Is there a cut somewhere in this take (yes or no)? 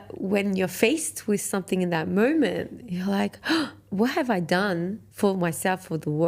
no